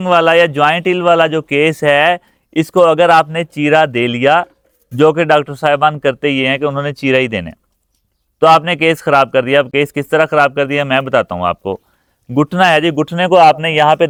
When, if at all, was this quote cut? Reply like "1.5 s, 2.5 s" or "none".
none